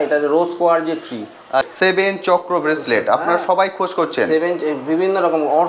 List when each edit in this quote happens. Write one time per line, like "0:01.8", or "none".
0:01.7